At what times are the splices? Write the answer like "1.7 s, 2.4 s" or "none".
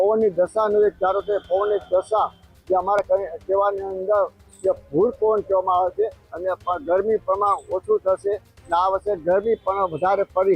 none